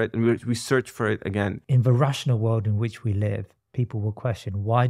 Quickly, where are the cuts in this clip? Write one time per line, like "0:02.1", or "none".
0:01.6